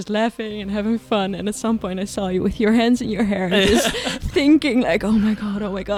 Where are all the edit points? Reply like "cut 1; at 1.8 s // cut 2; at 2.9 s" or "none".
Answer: none